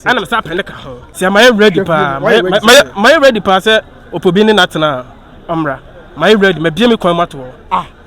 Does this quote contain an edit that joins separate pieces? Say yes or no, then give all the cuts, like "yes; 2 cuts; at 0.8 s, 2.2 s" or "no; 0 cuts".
yes; 1 cut; at 1.0 s